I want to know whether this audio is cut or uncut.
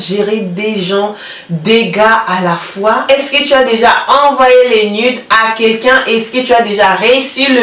cut